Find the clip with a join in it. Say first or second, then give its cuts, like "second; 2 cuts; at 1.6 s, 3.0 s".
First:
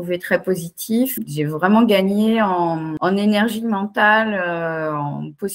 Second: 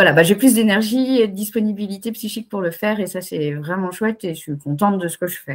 first; 2 cuts; at 1.2 s, 2.9 s